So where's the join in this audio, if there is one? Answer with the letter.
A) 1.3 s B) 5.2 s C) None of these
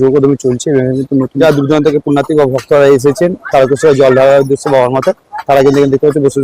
A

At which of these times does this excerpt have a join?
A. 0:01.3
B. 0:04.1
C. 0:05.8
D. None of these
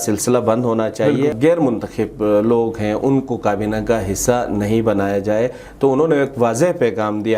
A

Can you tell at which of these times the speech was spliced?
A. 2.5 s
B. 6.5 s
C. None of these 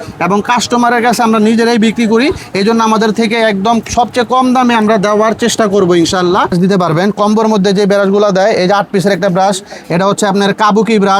B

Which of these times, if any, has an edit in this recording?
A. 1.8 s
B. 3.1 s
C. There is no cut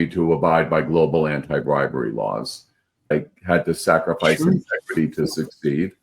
B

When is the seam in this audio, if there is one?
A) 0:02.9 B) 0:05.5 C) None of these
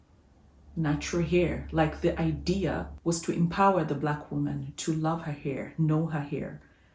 A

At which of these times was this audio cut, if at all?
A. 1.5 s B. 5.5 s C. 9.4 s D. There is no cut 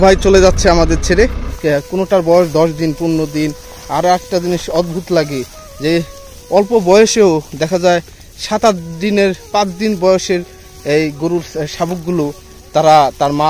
A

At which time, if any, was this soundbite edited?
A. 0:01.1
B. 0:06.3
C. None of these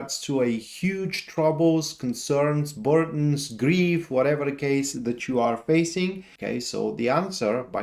B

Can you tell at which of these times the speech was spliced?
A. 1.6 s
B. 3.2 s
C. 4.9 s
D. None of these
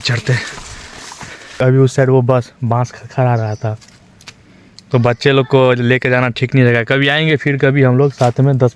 A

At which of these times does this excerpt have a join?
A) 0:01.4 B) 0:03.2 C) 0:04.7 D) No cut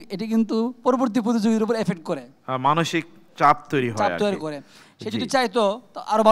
D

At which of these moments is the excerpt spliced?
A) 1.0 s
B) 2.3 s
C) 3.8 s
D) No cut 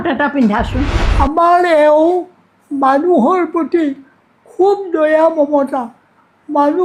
A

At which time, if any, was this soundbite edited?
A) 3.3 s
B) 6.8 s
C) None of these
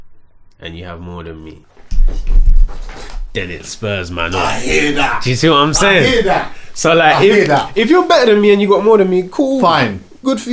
C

